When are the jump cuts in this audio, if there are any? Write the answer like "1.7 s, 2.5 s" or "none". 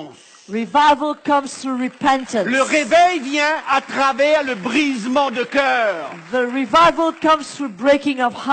none